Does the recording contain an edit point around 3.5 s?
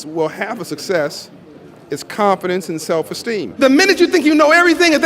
yes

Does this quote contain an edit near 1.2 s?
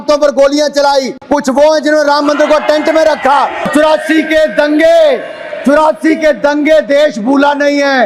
yes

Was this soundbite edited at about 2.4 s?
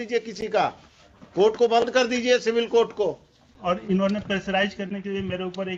no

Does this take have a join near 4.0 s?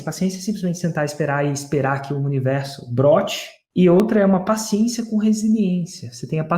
yes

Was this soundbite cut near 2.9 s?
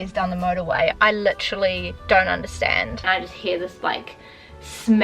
yes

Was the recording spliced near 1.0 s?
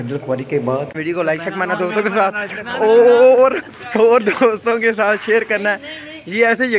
yes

